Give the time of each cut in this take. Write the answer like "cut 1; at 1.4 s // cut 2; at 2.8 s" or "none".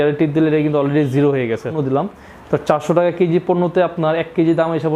cut 1; at 1.8 s